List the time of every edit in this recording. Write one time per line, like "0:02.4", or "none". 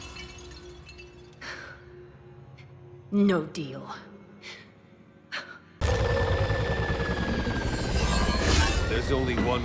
0:05.8